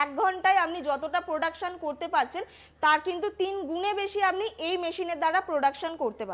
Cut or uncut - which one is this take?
uncut